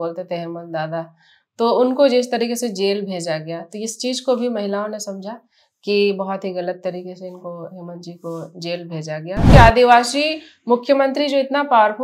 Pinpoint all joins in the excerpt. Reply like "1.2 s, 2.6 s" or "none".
9.5 s